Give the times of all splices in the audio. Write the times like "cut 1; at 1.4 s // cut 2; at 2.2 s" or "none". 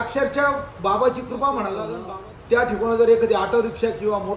cut 1; at 2.0 s